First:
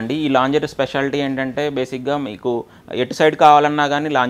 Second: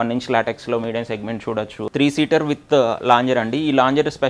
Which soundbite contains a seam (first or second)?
second